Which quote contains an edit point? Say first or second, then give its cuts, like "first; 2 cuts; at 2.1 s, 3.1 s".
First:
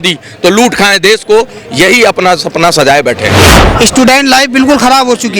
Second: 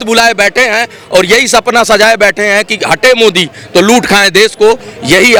first; 1 cut; at 3.5 s